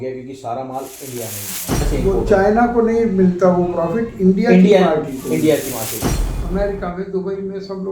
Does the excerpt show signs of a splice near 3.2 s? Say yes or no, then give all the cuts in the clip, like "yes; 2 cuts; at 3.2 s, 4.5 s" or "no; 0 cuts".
no; 2 cuts; at 1.9 s, 6.0 s